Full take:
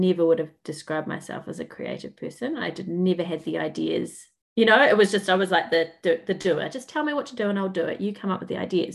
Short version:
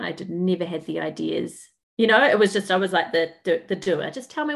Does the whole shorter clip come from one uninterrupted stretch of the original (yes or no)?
yes